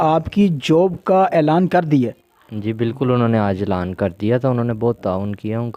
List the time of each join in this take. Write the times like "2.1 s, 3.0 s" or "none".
none